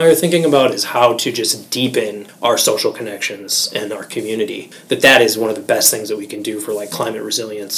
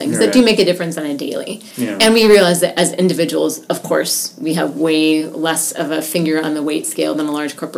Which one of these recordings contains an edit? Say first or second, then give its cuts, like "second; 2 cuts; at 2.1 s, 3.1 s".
first; 2 cuts; at 2.2 s, 4.7 s